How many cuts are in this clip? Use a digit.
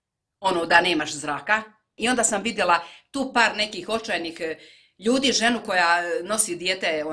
1